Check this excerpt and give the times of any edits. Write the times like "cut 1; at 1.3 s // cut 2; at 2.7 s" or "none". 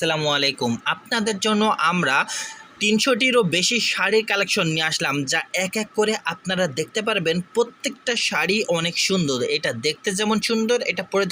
none